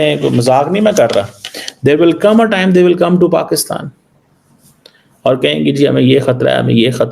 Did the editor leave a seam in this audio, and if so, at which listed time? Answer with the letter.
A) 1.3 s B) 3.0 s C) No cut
C